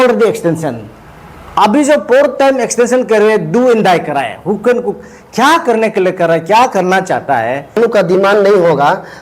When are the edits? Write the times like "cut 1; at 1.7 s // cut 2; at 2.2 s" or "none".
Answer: cut 1; at 7.8 s